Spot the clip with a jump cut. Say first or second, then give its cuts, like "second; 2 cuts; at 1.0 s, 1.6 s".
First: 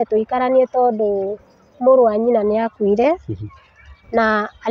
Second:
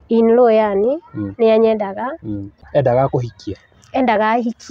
second; 1 cut; at 2.6 s